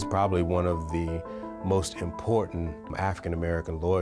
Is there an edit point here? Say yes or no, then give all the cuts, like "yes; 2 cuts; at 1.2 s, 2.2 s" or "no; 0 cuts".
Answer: yes; 1 cut; at 2.9 s